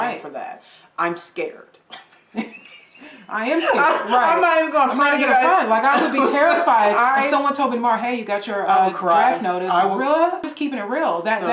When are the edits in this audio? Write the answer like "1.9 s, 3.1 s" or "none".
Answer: 10.5 s